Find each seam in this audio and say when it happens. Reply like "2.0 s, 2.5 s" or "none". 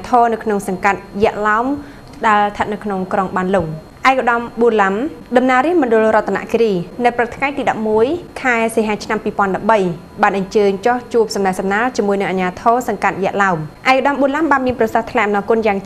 3.8 s, 5.1 s, 6.9 s, 8.3 s, 13.7 s